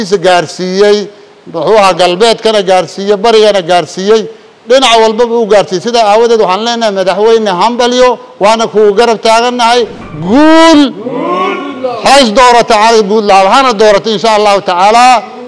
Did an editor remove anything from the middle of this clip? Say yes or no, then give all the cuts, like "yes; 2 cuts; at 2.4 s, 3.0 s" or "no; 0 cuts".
yes; 1 cut; at 10.0 s